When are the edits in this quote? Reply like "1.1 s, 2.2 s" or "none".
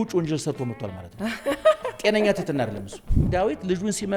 3.2 s